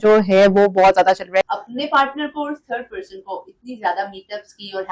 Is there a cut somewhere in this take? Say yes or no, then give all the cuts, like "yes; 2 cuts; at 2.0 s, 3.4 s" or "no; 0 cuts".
yes; 1 cut; at 1.5 s